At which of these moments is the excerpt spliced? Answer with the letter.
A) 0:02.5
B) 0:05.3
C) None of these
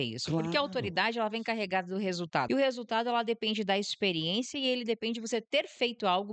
A